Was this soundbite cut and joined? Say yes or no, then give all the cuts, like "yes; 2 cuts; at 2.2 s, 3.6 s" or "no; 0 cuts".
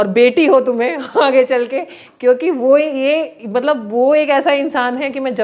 no; 0 cuts